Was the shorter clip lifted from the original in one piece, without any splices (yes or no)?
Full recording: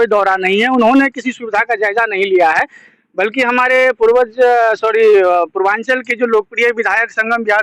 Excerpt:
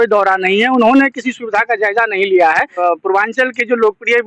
no